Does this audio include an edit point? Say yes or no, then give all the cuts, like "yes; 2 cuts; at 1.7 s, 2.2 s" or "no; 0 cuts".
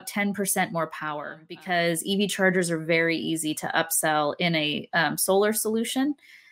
yes; 1 cut; at 1.5 s